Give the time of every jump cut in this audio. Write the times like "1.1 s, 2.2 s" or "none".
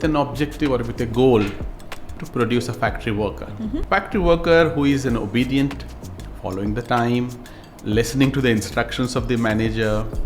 2.2 s, 3.8 s